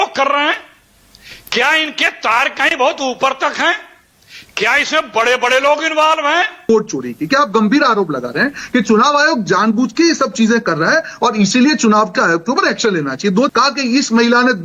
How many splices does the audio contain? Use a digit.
2